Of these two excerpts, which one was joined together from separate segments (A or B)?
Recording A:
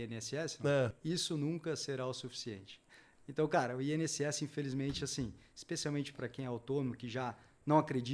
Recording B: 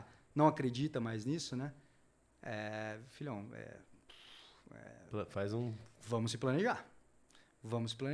A